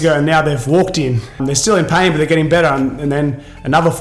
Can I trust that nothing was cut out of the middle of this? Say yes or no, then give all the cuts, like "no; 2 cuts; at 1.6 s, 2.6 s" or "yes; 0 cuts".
yes; 0 cuts